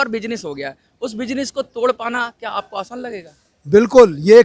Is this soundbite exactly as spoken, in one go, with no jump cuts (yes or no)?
yes